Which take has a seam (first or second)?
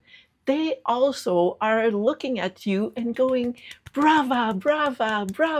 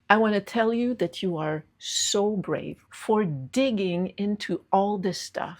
second